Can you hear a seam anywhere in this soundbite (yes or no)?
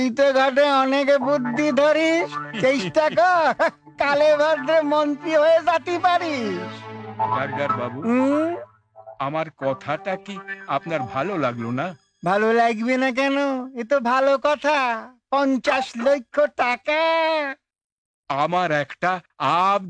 no